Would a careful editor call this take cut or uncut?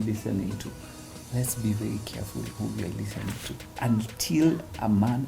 cut